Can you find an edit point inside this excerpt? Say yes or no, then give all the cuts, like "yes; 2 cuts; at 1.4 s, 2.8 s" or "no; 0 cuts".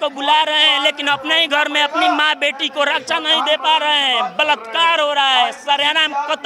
no; 0 cuts